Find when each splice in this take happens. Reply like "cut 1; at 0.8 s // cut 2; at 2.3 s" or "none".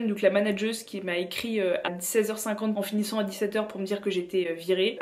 cut 1; at 1.9 s